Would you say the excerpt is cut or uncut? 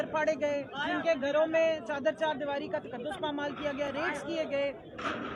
uncut